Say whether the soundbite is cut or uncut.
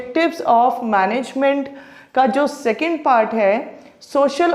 uncut